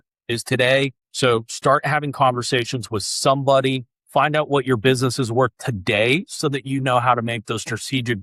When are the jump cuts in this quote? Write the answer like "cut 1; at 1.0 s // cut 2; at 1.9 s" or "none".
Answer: none